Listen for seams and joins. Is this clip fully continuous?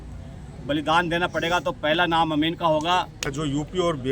no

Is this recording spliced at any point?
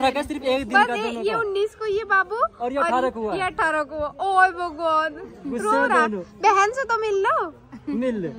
no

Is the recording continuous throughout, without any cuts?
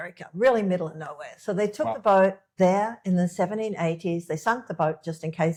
yes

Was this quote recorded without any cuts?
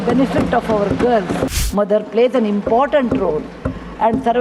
no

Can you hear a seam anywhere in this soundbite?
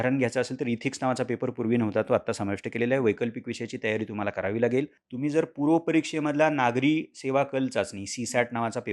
yes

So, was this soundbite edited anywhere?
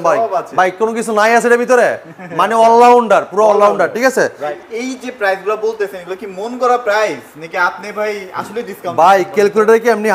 yes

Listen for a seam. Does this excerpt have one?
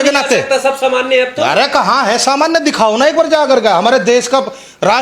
no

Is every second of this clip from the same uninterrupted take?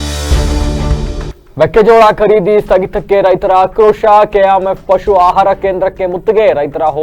no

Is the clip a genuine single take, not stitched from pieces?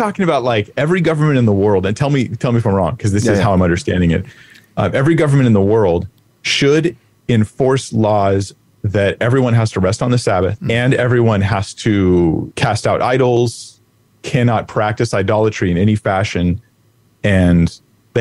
no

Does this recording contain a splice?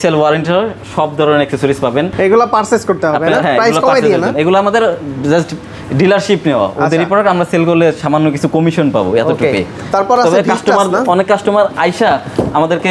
no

